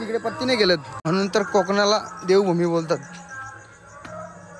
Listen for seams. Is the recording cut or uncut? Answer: cut